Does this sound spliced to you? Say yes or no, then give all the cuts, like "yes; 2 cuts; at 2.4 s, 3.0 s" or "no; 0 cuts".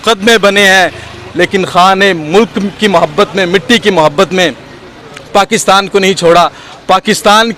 no; 0 cuts